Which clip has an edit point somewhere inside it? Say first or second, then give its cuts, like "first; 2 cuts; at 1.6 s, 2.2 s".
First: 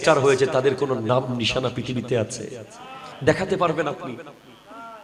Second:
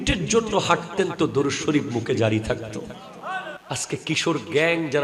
second; 1 cut; at 3.6 s